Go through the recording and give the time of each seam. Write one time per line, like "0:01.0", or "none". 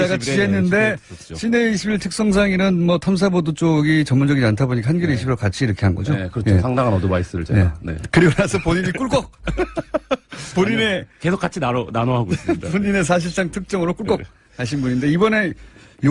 0:01.0